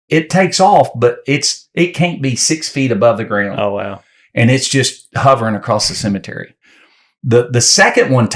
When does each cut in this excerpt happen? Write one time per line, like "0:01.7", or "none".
none